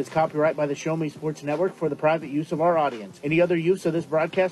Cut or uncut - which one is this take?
uncut